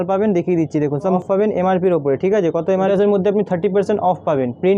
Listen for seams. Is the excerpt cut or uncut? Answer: cut